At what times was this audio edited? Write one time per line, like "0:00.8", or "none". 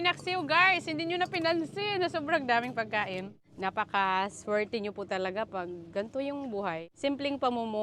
0:03.4
0:06.9